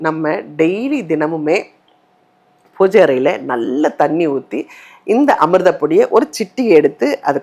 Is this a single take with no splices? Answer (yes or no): yes